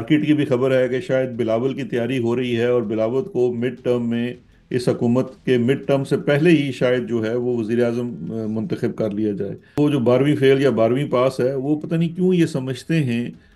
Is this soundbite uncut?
no; 1 cut; at 9.8 s

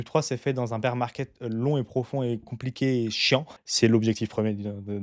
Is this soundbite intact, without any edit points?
no; 1 cut; at 3.5 s

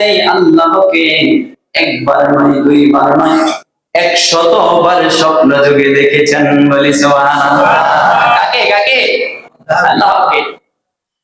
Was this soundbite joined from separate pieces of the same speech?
no; 0 cuts

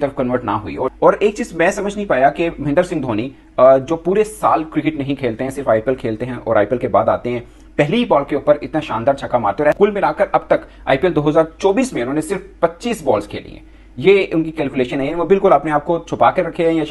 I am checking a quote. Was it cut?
no; 0 cuts

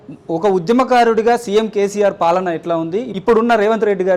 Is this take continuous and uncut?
no; 1 cut; at 3.1 s

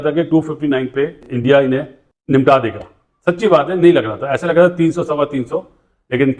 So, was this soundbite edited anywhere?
no; 0 cuts

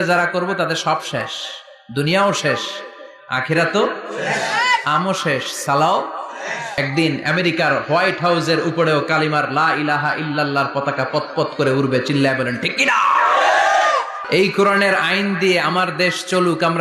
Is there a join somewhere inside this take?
yes; 2 cuts; at 6.8 s, 14.2 s

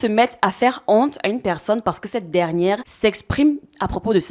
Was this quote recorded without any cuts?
yes; 0 cuts

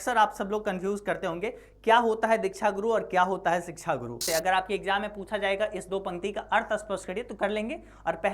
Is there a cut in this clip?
yes; 1 cut; at 4.2 s

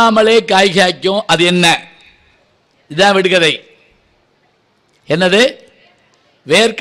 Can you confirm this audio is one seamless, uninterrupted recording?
yes; 0 cuts

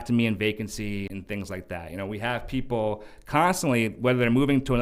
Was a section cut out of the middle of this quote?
yes; 1 cut; at 1.1 s

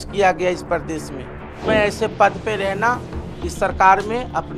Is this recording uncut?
no; 1 cut; at 1.6 s

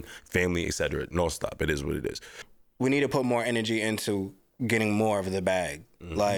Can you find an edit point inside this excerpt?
yes; 1 cut; at 2.5 s

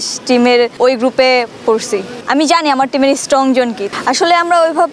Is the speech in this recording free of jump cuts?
no; 3 cuts; at 0.8 s, 2.2 s, 3.9 s

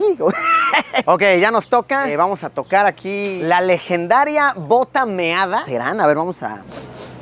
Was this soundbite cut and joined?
yes; 4 cuts; at 1.0 s, 2.1 s, 3.4 s, 5.6 s

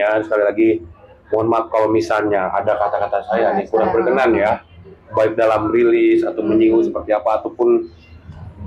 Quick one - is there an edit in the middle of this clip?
no; 0 cuts

